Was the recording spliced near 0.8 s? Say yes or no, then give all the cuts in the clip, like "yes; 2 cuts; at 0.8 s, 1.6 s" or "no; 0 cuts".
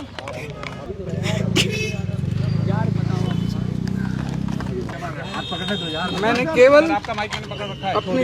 yes; 2 cuts; at 0.8 s, 4.9 s